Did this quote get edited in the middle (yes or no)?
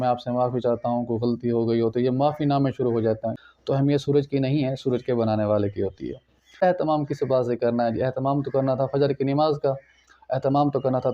yes